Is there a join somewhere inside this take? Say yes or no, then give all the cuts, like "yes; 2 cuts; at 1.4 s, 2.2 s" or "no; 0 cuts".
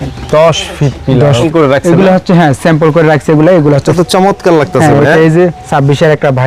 yes; 2 cuts; at 1.4 s, 3.9 s